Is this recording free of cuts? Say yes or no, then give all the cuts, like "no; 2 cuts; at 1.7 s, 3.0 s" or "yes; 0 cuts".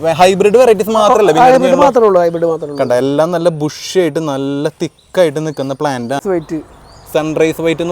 no; 1 cut; at 6.2 s